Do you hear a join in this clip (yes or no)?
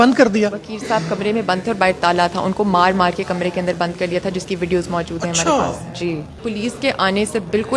yes